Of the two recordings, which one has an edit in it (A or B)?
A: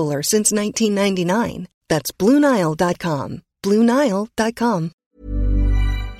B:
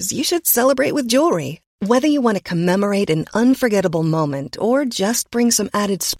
A